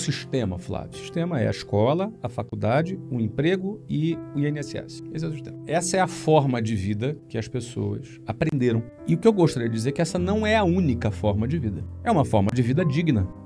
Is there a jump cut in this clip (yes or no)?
no